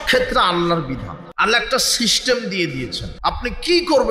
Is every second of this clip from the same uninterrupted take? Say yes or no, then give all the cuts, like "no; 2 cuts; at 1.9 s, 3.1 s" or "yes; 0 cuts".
no; 2 cuts; at 1.2 s, 3.0 s